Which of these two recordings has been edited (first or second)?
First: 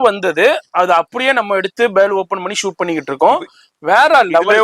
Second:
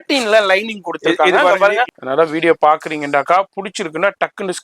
second